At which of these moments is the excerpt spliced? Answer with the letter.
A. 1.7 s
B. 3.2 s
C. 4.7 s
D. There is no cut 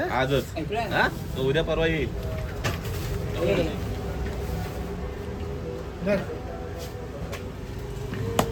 D